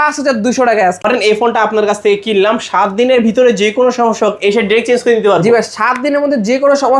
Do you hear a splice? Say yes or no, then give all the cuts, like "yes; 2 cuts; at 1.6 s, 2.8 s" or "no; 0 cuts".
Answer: yes; 1 cut; at 1.0 s